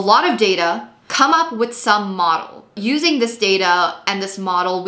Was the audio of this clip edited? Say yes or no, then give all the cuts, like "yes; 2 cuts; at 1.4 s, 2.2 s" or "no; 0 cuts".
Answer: yes; 2 cuts; at 1.1 s, 2.7 s